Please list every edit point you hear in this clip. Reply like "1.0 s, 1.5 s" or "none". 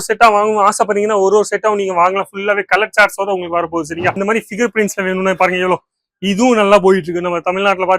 4.2 s